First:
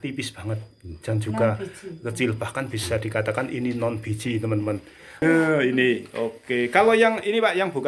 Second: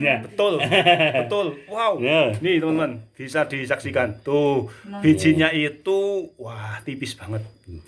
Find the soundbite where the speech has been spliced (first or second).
first